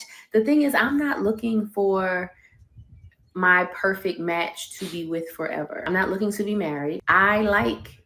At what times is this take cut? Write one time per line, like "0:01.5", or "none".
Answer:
0:05.8
0:07.0